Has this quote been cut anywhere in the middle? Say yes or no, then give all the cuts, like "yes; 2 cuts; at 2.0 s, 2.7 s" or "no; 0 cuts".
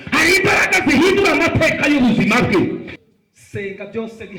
yes; 1 cut; at 2.9 s